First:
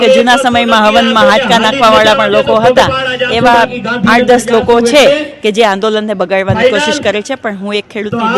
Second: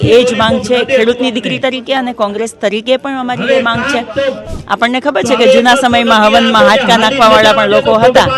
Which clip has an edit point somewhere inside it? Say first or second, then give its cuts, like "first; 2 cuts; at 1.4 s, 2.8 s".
second; 1 cut; at 4.4 s